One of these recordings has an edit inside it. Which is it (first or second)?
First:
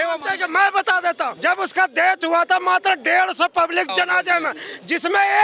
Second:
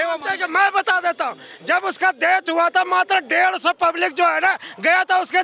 first